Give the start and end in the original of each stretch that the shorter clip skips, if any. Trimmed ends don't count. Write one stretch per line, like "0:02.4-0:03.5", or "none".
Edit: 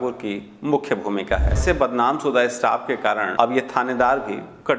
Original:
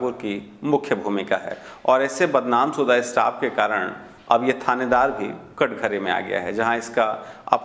0:01.6-0:02.1
0:03.8-0:04.2